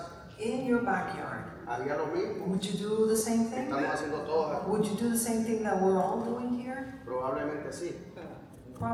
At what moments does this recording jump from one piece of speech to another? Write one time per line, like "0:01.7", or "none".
none